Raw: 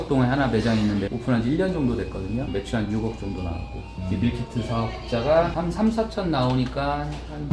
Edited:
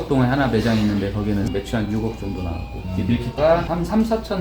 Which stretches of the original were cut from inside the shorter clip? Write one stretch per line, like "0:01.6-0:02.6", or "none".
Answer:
0:01.2-0:02.2
0:04.0-0:04.9